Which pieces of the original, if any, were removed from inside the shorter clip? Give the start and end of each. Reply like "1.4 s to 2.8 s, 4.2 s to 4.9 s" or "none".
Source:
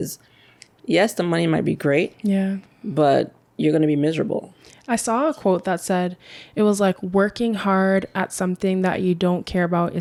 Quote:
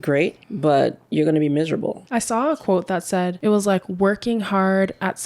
2.7 s to 3.4 s, 4.5 s to 4.8 s, 6.1 s to 6.5 s

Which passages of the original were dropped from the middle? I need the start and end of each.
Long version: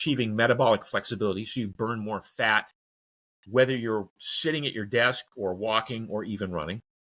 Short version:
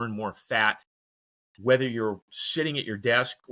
none

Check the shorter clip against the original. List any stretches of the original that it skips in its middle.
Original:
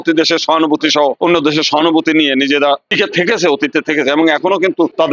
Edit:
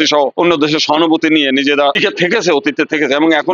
2.8 s to 2.9 s

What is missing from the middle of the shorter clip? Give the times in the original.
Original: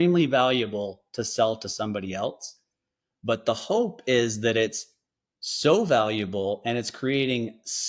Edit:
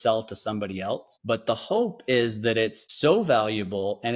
2.4 s to 3.1 s, 4.8 s to 5.5 s

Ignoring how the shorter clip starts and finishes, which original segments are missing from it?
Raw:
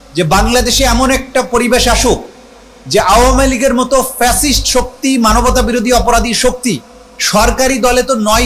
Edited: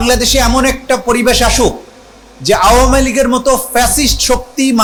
none

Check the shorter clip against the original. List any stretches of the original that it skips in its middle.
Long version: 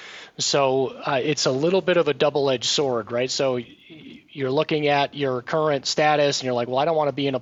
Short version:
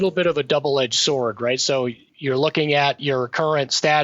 3.8 s to 4.2 s

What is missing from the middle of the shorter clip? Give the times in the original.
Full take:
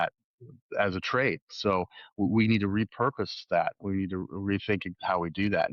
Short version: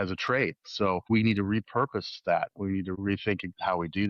1.9 s to 2.3 s, 4.2 s to 4.4 s

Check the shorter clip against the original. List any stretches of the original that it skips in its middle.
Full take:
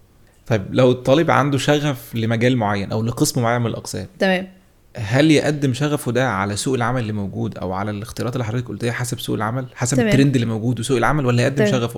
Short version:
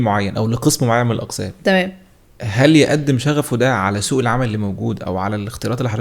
none

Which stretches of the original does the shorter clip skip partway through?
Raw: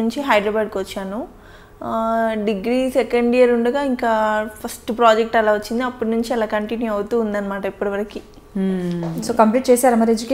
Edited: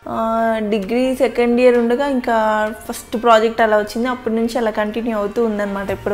none

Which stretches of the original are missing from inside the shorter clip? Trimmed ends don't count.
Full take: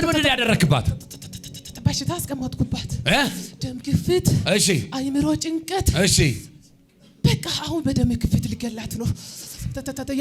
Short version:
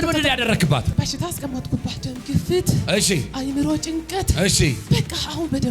0.9 s to 1.8 s, 2.9 s to 3.6 s, 6.4 s to 7.1 s

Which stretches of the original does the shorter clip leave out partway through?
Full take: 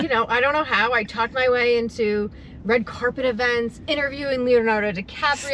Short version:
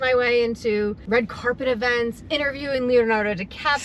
2.3 s to 2.6 s

